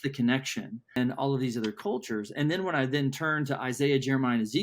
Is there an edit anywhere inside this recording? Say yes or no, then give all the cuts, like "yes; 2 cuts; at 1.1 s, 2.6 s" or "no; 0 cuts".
yes; 1 cut; at 1.0 s